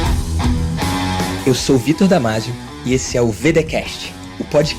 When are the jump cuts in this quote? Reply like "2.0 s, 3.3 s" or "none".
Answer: none